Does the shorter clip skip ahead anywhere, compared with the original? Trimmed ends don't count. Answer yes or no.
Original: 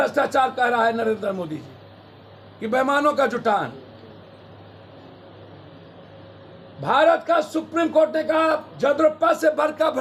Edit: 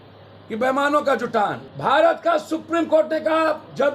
yes